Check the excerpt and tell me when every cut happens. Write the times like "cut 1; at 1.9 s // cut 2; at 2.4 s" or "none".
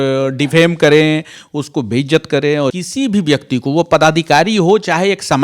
cut 1; at 2.7 s